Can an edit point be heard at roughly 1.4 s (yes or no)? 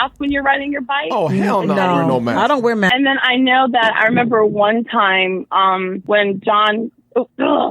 no